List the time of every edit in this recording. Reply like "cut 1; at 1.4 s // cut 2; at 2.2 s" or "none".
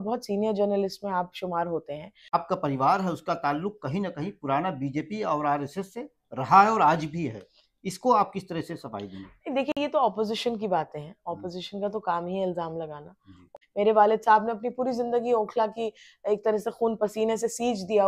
cut 1; at 2.3 s // cut 2; at 13.5 s